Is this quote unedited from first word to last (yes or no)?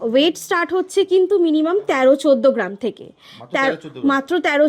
yes